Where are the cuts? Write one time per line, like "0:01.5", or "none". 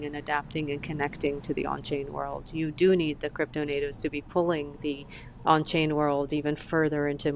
none